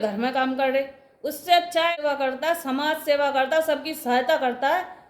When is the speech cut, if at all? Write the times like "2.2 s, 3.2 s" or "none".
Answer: 2.0 s